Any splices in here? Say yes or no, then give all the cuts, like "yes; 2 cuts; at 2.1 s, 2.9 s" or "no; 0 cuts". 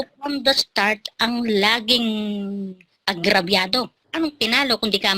yes; 1 cut; at 4.0 s